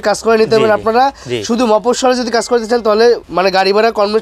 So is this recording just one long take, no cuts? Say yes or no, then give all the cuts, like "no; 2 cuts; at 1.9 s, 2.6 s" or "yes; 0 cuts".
no; 1 cut; at 3.3 s